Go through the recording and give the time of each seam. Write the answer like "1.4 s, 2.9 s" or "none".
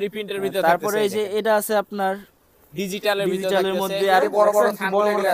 4.2 s